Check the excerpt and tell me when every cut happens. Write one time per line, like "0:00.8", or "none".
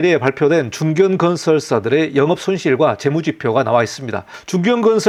none